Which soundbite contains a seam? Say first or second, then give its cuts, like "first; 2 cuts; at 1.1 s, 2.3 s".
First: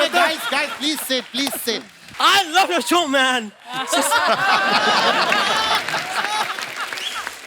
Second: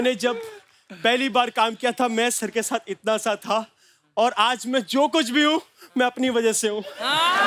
first; 1 cut; at 2.0 s